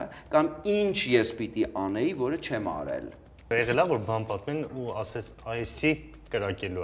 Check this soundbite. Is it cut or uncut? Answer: cut